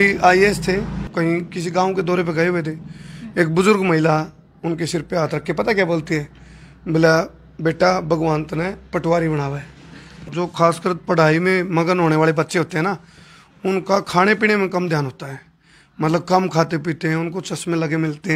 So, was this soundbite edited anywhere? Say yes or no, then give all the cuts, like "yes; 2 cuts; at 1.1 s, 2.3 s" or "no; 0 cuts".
yes; 2 cuts; at 1.0 s, 10.2 s